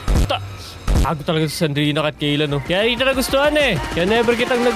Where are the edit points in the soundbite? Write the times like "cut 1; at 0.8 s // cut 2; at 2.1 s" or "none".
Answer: cut 1; at 2.6 s // cut 2; at 3.8 s